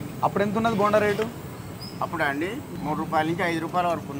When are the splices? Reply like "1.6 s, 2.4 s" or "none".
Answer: 2.7 s